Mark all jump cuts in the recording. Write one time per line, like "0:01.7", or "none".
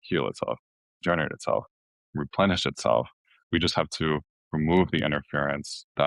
none